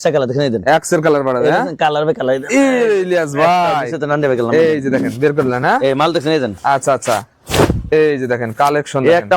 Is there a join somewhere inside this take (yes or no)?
no